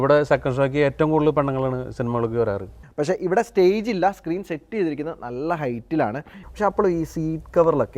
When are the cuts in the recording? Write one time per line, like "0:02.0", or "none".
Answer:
0:02.8
0:06.4